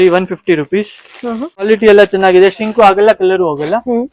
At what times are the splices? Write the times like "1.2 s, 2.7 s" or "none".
1.7 s